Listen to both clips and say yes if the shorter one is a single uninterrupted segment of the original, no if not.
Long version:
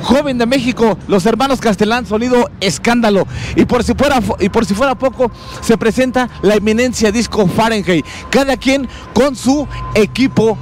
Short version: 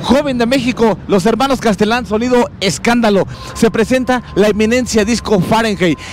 no